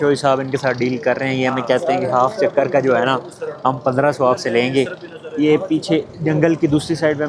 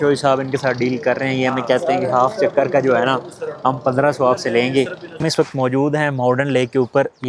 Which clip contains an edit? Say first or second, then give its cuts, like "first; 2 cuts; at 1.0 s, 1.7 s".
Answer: second; 1 cut; at 5.0 s